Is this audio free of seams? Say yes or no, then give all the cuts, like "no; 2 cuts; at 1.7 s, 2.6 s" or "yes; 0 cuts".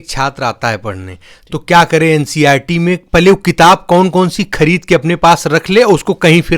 yes; 0 cuts